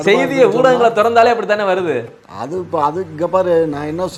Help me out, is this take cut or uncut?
uncut